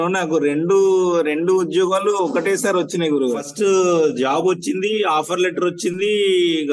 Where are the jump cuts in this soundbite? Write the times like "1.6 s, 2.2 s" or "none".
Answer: 3.5 s